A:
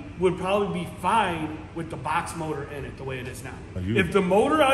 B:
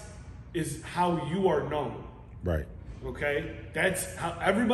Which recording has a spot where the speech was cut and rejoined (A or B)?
A